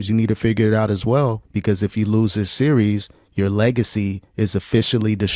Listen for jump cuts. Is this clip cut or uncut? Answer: cut